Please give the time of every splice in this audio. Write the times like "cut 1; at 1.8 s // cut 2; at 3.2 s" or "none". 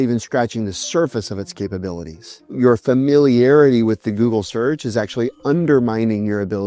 cut 1; at 2.5 s